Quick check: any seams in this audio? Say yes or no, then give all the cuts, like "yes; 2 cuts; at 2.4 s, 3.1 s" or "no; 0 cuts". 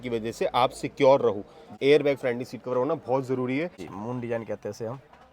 yes; 2 cuts; at 1.7 s, 3.8 s